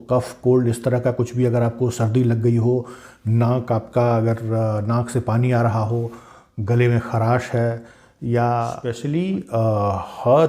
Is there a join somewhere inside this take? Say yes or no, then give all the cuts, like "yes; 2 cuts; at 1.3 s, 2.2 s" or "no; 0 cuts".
yes; 1 cut; at 8.9 s